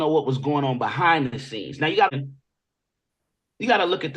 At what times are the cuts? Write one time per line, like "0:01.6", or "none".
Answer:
0:02.1